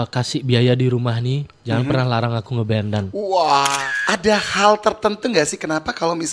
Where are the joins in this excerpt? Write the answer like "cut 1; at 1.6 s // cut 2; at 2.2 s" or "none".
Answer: cut 1; at 3.7 s

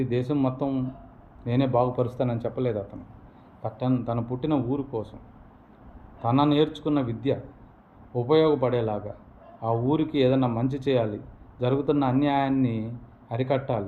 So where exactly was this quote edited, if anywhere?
cut 1; at 11.8 s

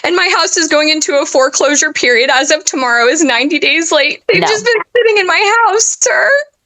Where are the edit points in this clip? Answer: cut 1; at 4.2 s

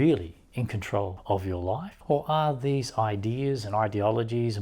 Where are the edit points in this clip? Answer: cut 1; at 1.2 s // cut 2; at 1.9 s

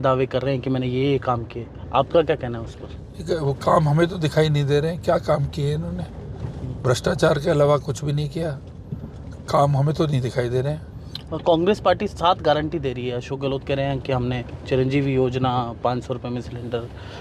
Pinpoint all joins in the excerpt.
none

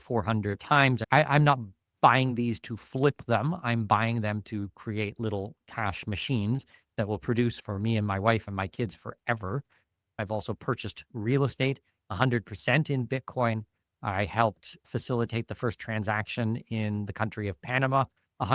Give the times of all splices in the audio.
cut 1; at 1.0 s // cut 2; at 10.2 s

